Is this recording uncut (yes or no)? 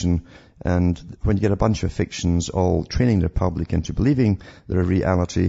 yes